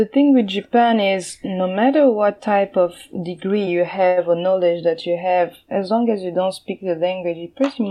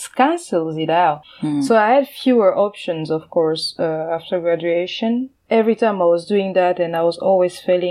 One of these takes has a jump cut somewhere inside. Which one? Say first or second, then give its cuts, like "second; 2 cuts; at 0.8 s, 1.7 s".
second; 2 cuts; at 1.2 s, 5.3 s